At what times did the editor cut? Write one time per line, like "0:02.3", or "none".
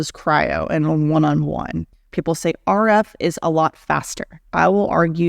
0:02.0
0:04.4